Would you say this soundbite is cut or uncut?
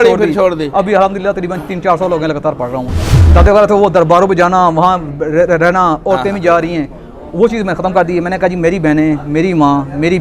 cut